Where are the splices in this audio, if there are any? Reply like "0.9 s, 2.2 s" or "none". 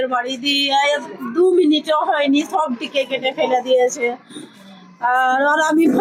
none